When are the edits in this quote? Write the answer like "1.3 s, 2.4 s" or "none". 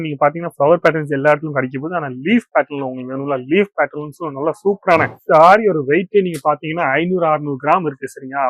5.2 s